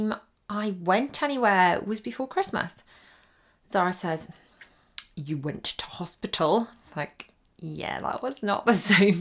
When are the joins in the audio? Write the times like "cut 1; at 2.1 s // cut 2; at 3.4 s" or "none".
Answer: none